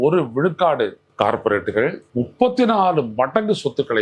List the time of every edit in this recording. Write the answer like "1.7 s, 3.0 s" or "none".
1.0 s, 2.0 s